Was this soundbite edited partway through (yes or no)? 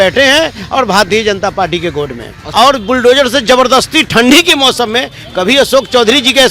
yes